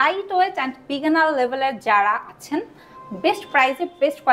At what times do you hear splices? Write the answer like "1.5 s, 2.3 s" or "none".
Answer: none